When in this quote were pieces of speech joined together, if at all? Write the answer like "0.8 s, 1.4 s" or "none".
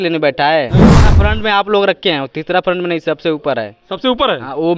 0.9 s